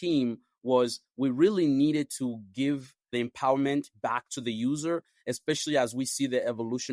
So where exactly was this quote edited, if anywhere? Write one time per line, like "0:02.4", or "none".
0:03.0

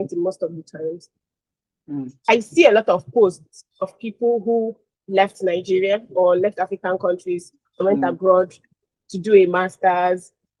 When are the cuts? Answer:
none

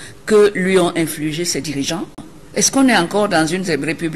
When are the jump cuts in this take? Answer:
0:02.3

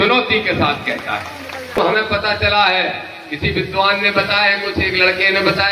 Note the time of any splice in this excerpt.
0:01.8

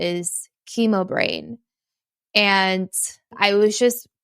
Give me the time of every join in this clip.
0:03.3

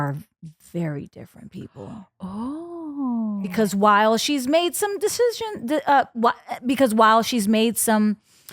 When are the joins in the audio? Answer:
0:03.4

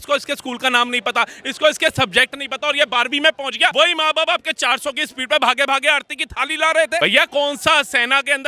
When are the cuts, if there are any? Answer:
0:03.7
0:07.0

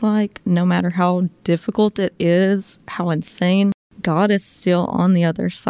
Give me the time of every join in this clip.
0:03.9

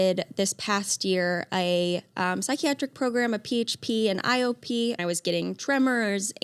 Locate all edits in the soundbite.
0:05.0

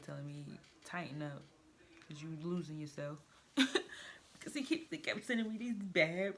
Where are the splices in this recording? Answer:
none

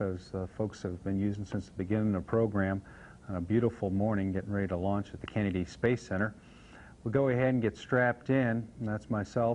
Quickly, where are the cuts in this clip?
0:01.0

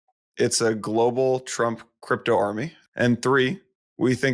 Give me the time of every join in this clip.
0:02.8

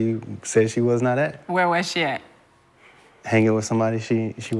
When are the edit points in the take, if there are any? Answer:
none

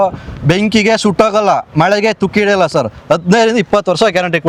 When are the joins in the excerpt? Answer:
none

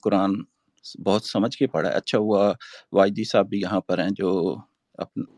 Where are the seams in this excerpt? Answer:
none

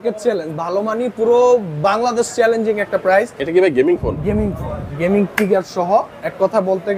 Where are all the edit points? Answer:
0:03.4

